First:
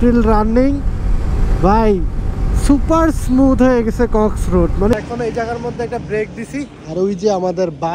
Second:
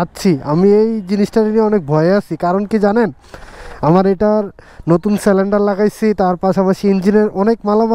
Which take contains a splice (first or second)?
first